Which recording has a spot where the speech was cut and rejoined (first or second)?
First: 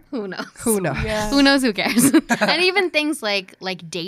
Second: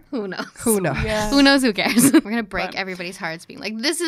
second